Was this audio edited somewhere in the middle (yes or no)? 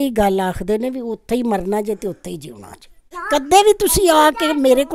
yes